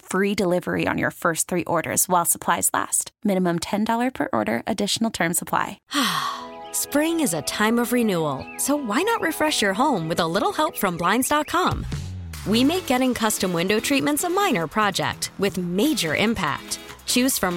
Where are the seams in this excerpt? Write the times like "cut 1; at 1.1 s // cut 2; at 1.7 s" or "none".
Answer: cut 1; at 5.8 s